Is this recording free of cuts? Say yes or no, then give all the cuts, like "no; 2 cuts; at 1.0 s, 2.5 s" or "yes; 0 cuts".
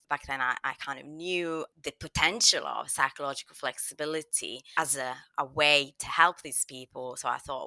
yes; 0 cuts